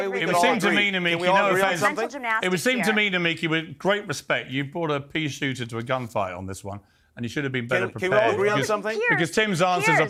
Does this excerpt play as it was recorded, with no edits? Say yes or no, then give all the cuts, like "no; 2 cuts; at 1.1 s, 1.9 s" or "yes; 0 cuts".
yes; 0 cuts